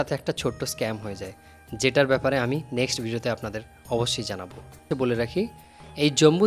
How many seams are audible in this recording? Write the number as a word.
one